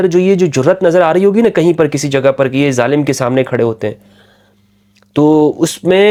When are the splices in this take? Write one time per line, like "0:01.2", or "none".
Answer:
none

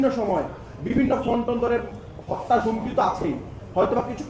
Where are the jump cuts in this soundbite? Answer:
none

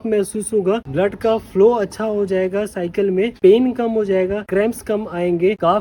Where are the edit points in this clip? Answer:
none

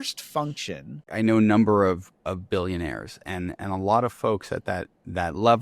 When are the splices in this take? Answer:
0:01.0

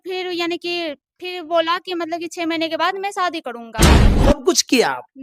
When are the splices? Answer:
0:04.1

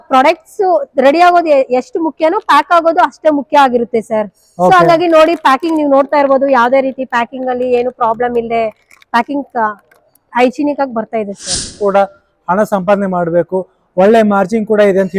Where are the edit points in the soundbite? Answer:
0:11.8

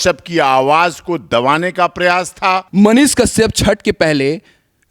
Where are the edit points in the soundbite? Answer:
0:02.7

